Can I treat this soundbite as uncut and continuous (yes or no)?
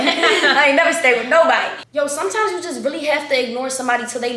no